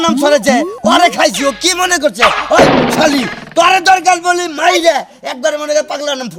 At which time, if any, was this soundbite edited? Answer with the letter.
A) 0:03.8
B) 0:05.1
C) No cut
C